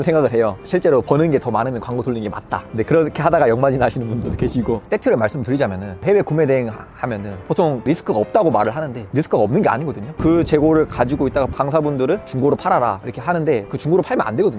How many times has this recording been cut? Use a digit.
4